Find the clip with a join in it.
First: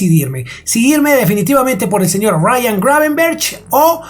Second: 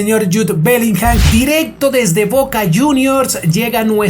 second; 1 cut; at 1.2 s

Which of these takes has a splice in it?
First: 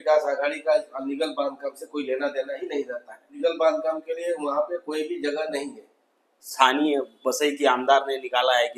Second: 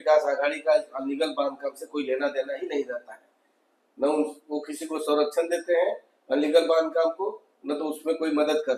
first; 2 cuts; at 3.4 s, 6.5 s

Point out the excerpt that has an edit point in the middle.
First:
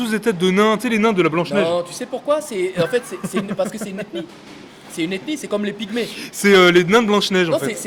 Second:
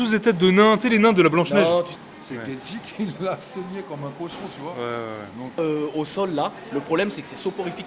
second; 2 cuts; at 2.0 s, 5.6 s

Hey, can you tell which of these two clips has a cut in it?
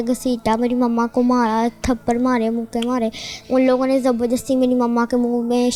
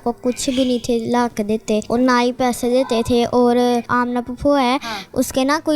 second; 2 cuts; at 1.9 s, 3.9 s

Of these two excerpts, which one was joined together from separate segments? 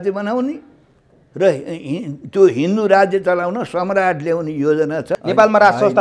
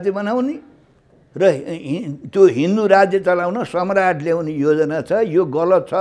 first; 1 cut; at 5.1 s

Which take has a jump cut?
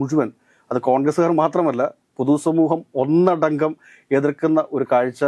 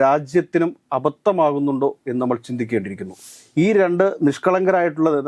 second; 1 cut; at 3.1 s

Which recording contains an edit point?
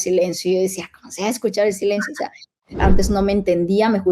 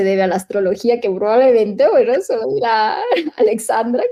first; 1 cut; at 2.8 s

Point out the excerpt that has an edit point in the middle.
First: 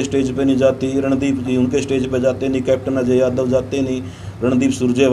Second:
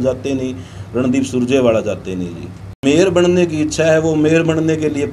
second; 1 cut; at 2.8 s

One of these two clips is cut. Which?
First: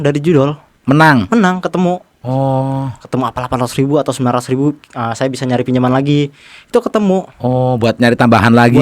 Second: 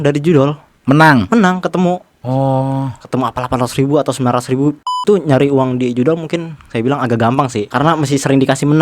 second; 2 cuts; at 4.9 s, 7.7 s

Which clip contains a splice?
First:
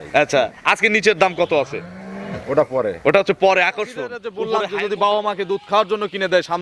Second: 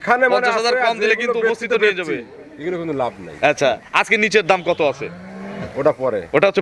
first; 1 cut; at 4.3 s

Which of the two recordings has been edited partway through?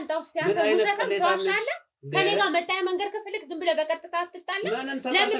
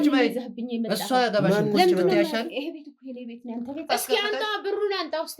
second; 1 cut; at 3.8 s

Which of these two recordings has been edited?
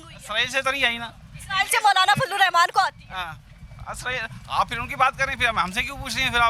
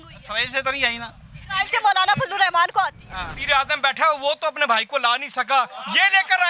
second; 1 cut; at 3.4 s

